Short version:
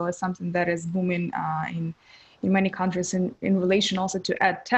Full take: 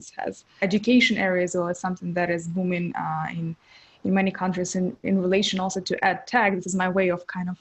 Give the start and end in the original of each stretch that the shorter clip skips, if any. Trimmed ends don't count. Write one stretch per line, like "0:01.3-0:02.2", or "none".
none